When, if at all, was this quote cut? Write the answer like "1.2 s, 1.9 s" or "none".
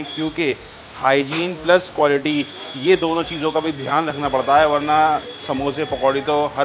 none